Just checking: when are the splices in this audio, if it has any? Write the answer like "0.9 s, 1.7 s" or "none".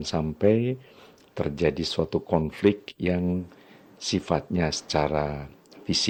none